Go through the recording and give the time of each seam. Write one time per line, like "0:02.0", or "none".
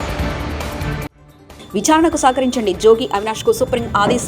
0:01.0